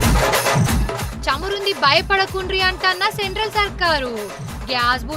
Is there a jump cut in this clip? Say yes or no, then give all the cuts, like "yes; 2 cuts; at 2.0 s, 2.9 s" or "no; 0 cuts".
yes; 1 cut; at 1.0 s